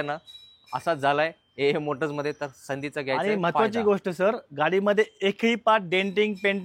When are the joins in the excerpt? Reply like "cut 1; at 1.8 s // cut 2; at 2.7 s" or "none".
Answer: none